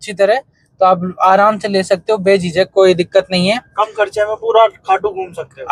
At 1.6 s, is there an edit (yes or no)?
no